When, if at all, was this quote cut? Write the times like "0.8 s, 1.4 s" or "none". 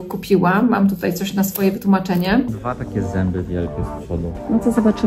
2.5 s